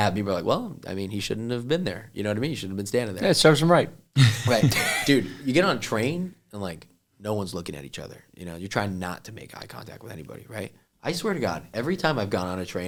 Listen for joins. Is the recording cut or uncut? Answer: uncut